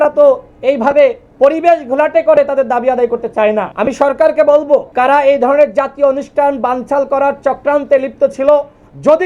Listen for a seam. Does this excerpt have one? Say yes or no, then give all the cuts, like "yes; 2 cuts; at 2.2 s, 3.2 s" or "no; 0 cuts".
yes; 3 cuts; at 1.2 s, 3.7 s, 4.9 s